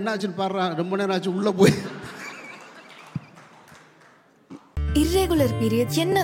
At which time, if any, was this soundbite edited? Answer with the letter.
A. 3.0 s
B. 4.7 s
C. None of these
B